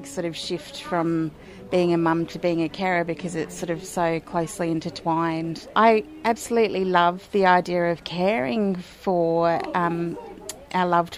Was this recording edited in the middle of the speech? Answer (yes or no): yes